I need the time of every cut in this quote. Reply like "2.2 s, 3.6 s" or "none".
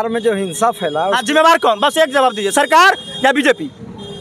none